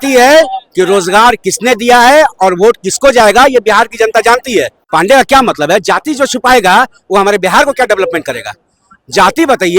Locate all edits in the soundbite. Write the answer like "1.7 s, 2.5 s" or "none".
4.8 s